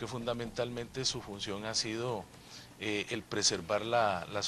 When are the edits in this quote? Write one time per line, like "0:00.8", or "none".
0:03.2